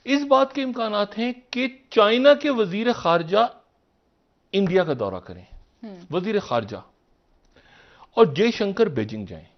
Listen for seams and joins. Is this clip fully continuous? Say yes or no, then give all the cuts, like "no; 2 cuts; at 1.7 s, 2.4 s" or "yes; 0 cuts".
yes; 0 cuts